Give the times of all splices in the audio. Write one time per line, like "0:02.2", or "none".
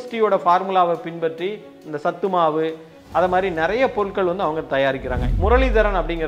0:05.2